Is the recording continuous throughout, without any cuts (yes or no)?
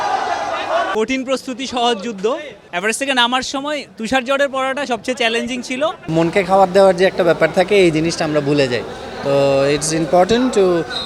no